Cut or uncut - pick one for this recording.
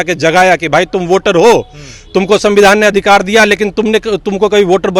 uncut